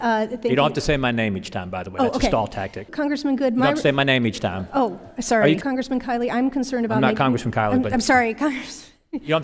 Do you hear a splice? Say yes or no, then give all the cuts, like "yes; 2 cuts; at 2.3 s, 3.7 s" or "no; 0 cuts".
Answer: yes; 2 cuts; at 2.9 s, 5.6 s